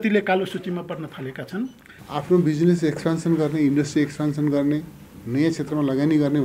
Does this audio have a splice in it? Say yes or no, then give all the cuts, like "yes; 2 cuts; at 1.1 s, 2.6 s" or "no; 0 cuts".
yes; 1 cut; at 1.9 s